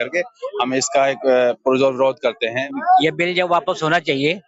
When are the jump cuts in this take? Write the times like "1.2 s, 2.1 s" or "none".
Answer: 2.6 s